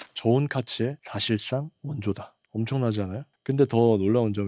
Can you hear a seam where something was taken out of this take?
yes; 3 cuts; at 1.0 s, 2.2 s, 3.3 s

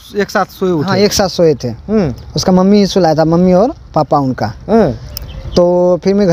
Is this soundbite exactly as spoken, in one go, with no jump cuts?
yes; 0 cuts

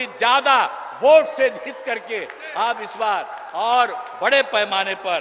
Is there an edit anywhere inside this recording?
no; 0 cuts

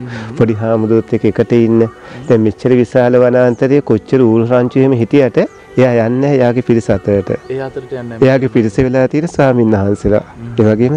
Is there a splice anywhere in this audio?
no; 0 cuts

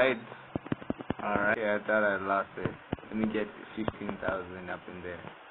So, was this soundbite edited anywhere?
yes; 1 cut; at 1.5 s

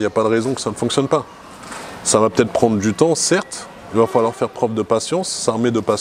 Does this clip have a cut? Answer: no; 0 cuts

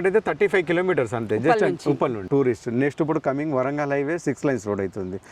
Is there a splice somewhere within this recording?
yes; 1 cut; at 2.3 s

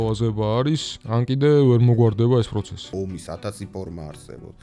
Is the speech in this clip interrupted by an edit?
yes; 2 cuts; at 0.9 s, 2.9 s

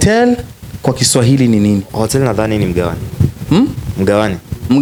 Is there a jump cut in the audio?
no; 0 cuts

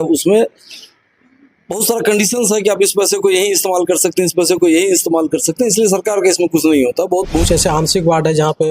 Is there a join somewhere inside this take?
yes; 1 cut; at 7.4 s

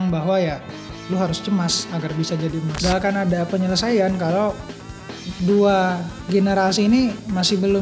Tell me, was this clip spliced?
yes; 1 cut; at 2.7 s

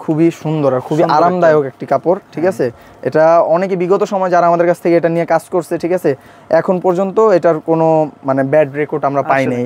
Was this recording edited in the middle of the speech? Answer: no; 0 cuts

